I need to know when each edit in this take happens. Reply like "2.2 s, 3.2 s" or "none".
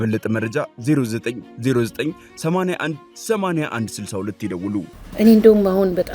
5.0 s